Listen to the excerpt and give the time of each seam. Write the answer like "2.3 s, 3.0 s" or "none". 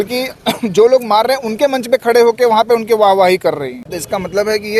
none